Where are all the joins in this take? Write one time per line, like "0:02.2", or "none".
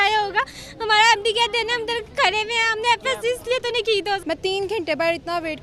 0:04.2

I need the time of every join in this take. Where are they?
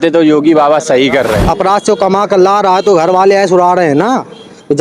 0:01.4

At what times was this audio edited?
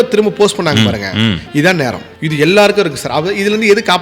0:02.1

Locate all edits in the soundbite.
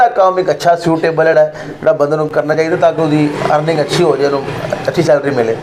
none

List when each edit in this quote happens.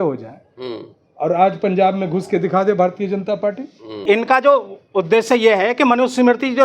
0:04.0

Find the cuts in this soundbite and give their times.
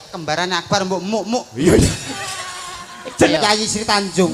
0:03.3

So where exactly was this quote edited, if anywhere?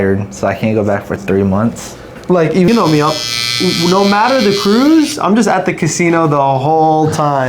0:02.7

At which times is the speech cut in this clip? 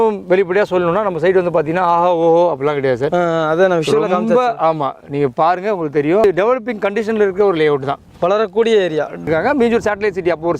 0:06.2
0:09.3

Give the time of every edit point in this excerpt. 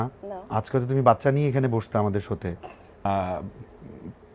0:03.0

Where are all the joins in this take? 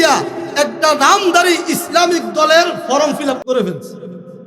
0:03.4

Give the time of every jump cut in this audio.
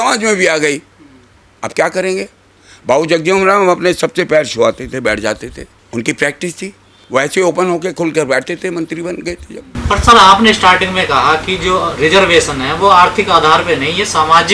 none

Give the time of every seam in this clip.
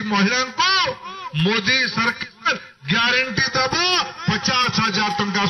none

